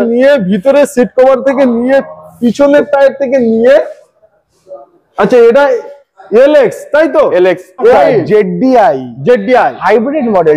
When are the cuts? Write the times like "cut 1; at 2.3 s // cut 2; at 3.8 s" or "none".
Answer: cut 1; at 7.9 s